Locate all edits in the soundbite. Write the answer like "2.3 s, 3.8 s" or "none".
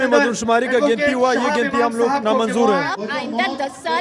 2.9 s